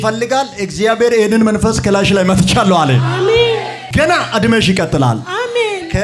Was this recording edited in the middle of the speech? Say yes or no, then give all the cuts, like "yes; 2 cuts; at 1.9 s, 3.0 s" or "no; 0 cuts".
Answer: no; 0 cuts